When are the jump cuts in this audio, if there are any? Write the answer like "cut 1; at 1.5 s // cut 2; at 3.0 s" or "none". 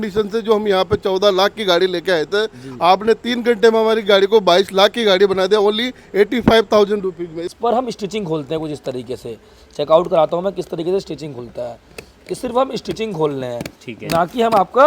cut 1; at 7.4 s